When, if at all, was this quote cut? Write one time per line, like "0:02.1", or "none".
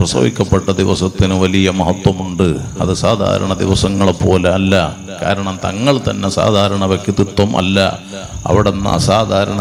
none